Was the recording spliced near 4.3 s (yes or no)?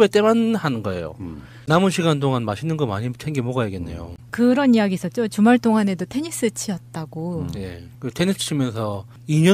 no